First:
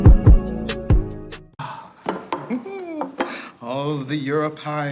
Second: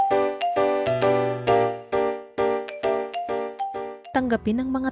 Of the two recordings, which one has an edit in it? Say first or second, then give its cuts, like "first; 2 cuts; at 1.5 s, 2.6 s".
second; 1 cut; at 4.0 s